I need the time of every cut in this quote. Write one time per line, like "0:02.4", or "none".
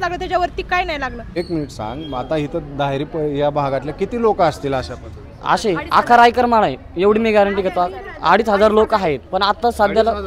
0:01.3